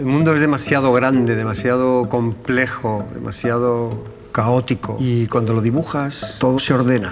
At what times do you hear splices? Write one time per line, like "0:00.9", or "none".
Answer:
0:04.9
0:06.2

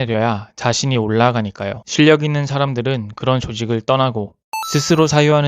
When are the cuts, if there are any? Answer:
0:04.4

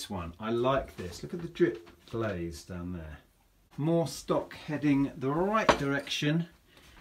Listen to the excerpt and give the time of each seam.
0:03.7

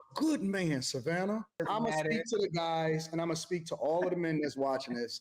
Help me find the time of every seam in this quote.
0:01.6

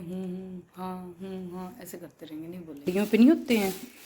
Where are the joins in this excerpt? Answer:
0:02.9

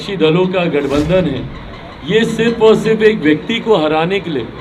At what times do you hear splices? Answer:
none

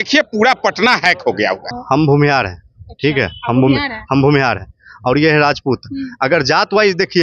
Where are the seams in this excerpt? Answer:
0:01.7

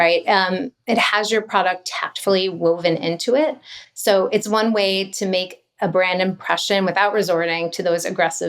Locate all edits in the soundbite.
none

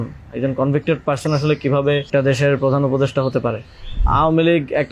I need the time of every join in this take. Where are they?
0:02.1
0:04.0

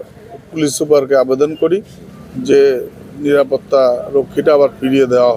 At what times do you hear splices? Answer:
none

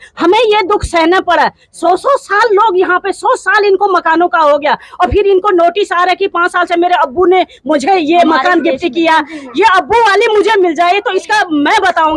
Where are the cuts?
none

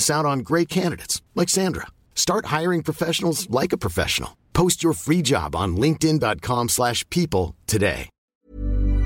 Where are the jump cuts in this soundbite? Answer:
0:08.1

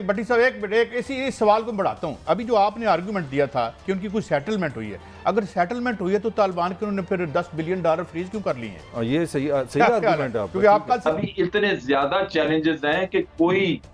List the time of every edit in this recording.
0:11.0

